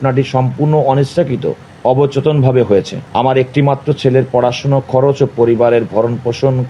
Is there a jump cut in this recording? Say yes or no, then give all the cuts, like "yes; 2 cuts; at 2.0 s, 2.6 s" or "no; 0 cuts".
yes; 2 cuts; at 1.7 s, 3.0 s